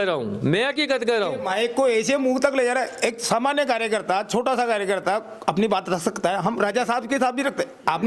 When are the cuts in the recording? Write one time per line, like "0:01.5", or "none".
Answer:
0:01.4